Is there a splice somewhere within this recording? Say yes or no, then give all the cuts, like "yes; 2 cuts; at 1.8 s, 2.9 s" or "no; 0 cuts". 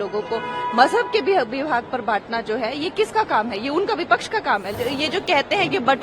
yes; 1 cut; at 4.7 s